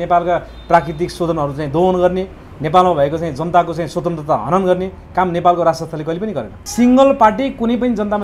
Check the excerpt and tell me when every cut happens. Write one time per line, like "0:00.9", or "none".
0:06.5